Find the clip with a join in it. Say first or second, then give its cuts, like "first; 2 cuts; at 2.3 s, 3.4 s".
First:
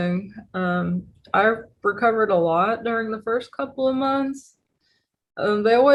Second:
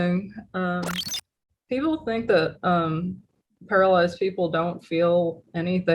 second; 1 cut; at 0.9 s